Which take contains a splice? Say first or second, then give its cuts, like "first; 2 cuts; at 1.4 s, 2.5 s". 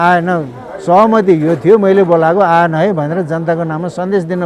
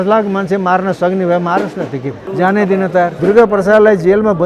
second; 2 cuts; at 2.3 s, 3.1 s